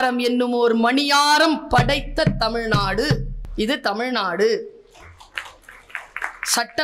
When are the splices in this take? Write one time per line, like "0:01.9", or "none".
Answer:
0:03.4